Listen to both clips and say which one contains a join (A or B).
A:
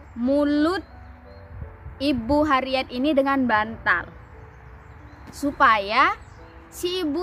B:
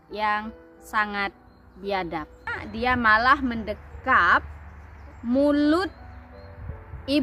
B